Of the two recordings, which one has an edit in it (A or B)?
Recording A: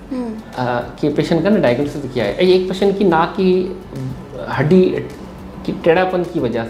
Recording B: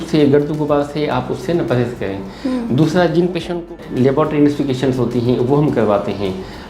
B